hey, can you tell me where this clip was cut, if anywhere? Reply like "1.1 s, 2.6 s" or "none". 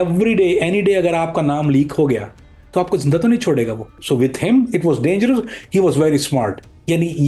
none